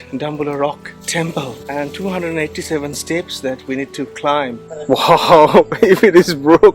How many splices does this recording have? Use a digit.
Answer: 1